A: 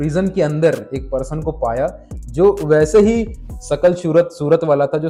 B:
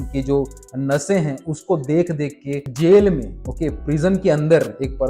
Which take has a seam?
B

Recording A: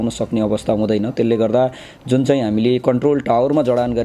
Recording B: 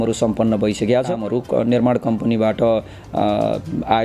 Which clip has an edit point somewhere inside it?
B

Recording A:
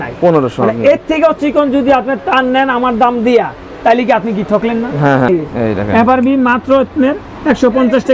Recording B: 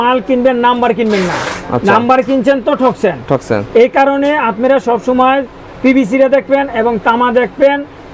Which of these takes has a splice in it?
A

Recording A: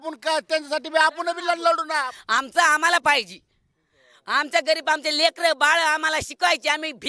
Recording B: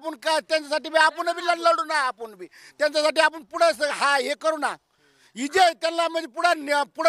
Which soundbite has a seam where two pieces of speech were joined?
A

